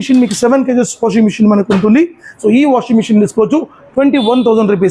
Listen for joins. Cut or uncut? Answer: uncut